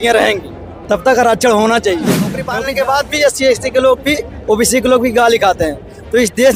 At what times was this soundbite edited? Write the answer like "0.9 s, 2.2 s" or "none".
2.4 s